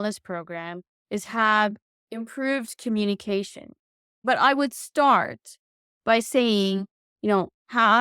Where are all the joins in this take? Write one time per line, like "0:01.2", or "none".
0:04.2